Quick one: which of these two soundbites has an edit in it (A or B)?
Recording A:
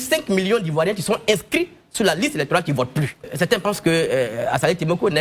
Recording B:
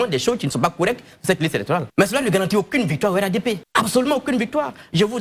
A